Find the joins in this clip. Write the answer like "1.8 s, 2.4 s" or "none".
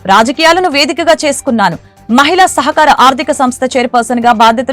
none